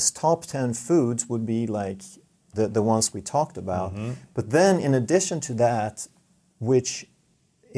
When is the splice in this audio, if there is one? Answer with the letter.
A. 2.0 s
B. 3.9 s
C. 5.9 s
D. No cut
D